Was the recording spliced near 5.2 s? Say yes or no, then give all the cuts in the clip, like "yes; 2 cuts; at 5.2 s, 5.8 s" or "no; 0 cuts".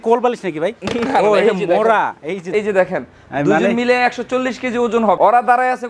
yes; 2 cuts; at 2.5 s, 5.2 s